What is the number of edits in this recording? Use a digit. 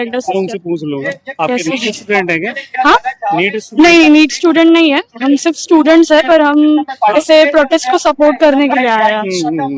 0